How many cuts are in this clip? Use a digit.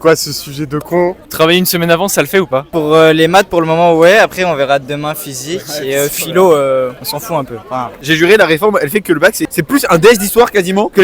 3